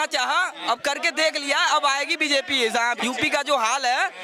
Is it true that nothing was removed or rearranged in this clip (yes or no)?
no